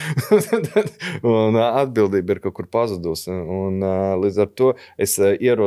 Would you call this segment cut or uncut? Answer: uncut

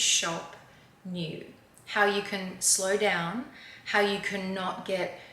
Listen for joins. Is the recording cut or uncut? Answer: uncut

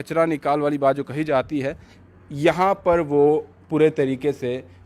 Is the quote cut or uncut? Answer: uncut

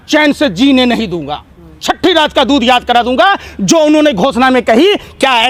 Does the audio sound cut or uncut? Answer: uncut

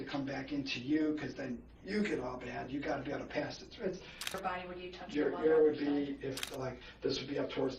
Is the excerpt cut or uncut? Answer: cut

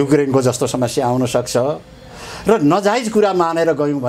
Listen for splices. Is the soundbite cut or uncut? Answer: uncut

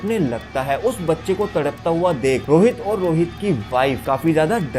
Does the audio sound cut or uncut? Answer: cut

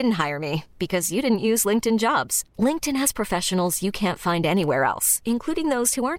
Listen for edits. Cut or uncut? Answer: uncut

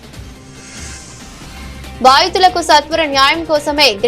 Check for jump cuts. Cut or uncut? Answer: uncut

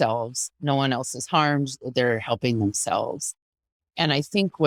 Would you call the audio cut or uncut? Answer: uncut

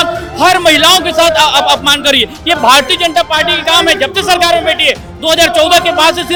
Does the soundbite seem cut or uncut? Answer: uncut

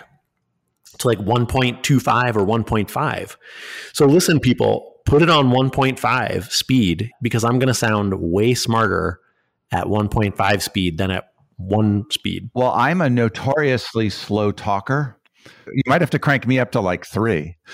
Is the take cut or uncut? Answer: cut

